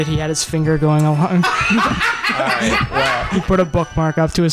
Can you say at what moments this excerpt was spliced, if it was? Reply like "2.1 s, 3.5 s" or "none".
3.3 s

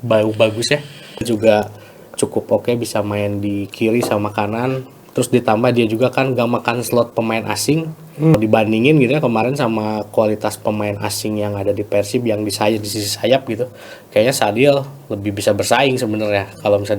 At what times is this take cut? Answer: 1.2 s, 8.3 s

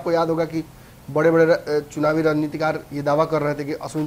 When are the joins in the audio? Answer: none

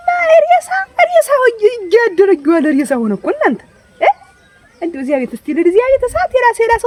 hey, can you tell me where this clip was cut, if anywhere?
none

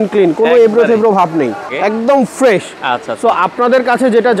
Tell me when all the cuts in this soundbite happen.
1.7 s

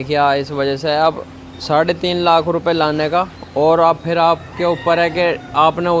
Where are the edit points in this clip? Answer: none

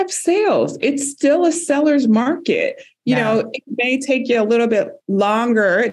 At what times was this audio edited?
none

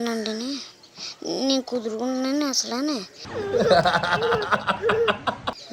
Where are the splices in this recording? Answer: 3.2 s

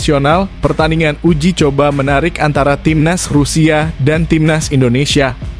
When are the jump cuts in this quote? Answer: none

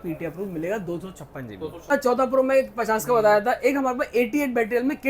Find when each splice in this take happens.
1.9 s

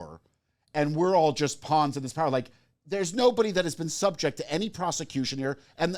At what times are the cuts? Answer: none

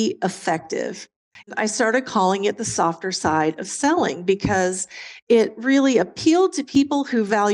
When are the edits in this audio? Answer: 1.5 s, 6.6 s

